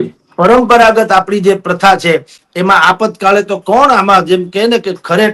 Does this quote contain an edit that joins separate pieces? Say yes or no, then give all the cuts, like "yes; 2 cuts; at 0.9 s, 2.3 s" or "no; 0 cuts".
no; 0 cuts